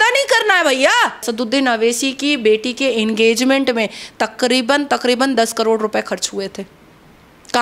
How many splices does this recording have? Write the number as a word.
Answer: one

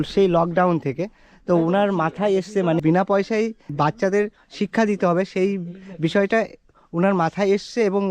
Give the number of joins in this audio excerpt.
two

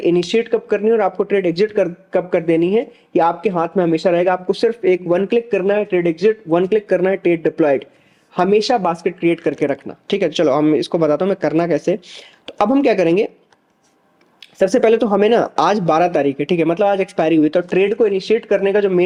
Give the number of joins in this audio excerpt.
zero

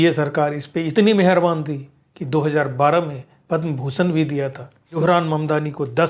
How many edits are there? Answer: one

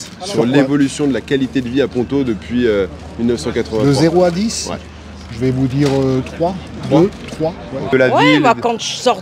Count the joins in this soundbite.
one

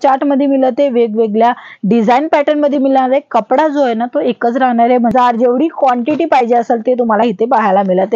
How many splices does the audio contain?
one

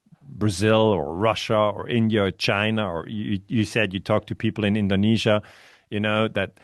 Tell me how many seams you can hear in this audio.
zero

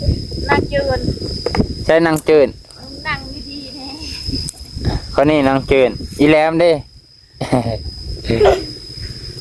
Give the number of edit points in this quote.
zero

